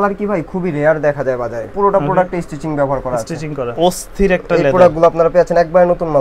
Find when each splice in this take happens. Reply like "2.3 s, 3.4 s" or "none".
1.7 s, 3.6 s